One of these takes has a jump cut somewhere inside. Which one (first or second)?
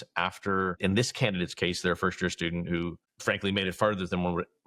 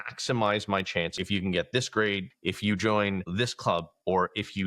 second